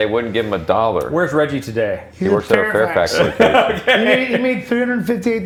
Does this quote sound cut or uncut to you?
uncut